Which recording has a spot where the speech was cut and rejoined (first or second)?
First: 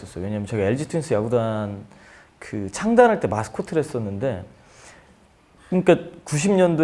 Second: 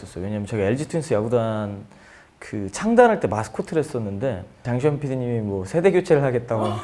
second